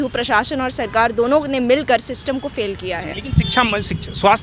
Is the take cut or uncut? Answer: uncut